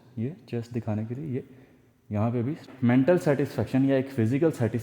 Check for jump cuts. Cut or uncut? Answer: cut